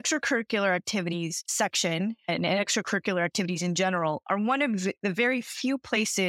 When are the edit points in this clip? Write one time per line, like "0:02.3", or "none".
none